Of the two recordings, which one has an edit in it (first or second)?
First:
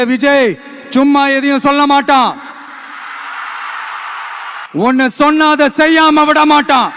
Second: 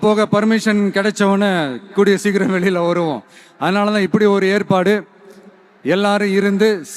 first